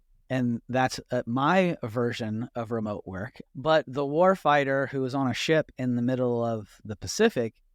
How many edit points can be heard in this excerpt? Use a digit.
0